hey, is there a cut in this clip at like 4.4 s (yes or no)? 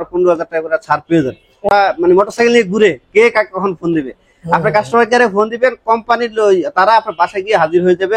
no